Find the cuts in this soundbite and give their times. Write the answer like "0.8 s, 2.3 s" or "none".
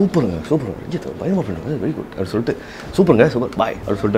none